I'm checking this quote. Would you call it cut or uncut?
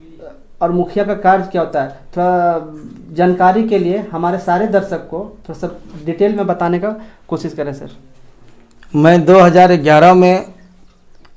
uncut